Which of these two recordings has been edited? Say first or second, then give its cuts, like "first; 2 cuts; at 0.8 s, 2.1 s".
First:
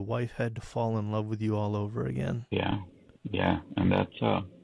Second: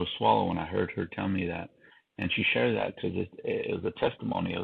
first; 1 cut; at 2.4 s